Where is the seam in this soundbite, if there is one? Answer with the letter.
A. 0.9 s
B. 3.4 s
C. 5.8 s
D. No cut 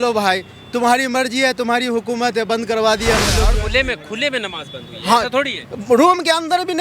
B